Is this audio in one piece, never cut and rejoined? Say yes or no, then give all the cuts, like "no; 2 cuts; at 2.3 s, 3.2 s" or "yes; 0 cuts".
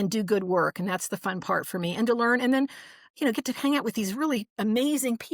yes; 0 cuts